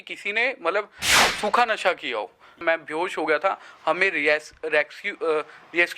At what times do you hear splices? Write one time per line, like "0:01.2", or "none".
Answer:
0:02.6

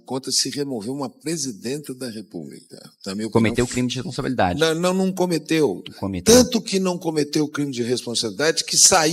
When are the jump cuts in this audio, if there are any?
none

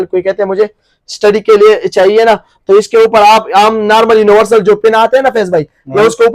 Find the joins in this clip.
none

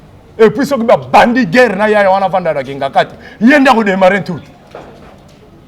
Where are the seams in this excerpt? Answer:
none

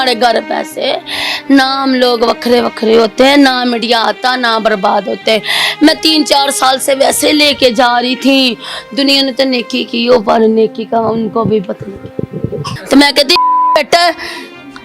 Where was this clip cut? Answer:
0:12.7

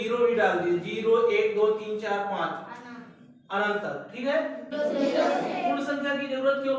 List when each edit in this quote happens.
0:04.6

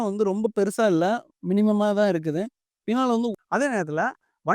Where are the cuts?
0:03.3

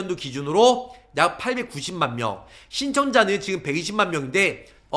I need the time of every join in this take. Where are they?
none

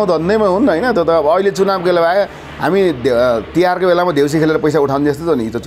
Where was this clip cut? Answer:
none

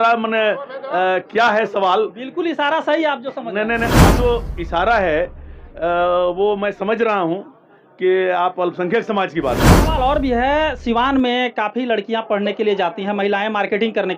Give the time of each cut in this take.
0:04.2
0:09.8

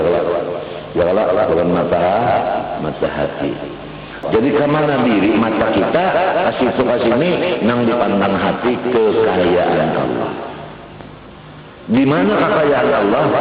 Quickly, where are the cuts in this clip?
0:04.2

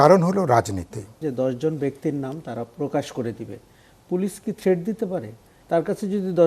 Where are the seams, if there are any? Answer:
0:01.1

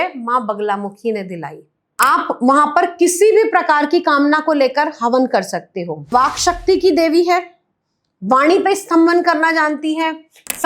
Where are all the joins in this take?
0:01.8
0:06.1

